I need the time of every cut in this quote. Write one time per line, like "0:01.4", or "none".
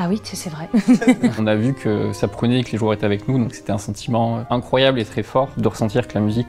0:01.4
0:05.5